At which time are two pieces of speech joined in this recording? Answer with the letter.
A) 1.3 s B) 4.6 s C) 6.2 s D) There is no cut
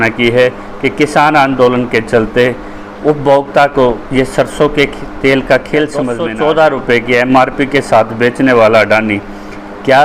C